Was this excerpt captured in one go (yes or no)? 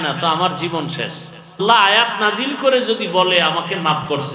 no